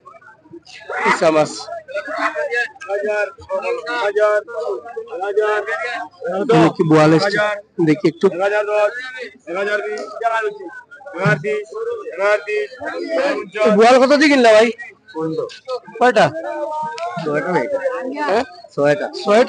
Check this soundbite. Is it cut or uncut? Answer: uncut